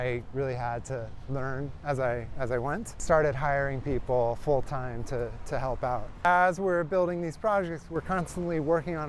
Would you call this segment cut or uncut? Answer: cut